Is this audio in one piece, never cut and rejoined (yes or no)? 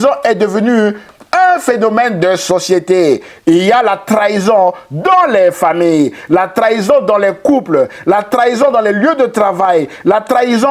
yes